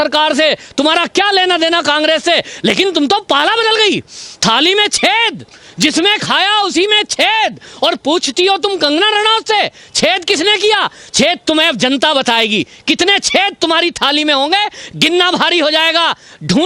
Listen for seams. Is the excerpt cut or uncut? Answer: uncut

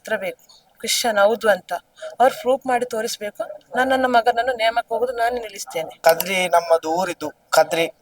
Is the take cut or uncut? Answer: cut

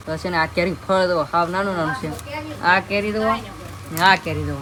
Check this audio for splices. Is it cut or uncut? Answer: uncut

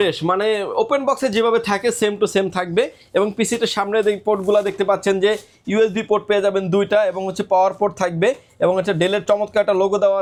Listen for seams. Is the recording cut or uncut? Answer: uncut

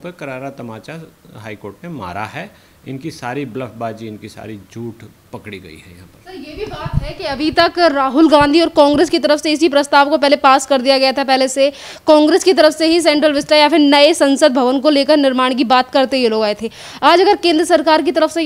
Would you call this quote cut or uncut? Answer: uncut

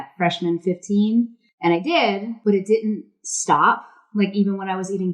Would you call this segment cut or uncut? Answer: cut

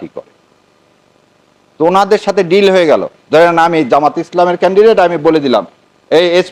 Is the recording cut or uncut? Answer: uncut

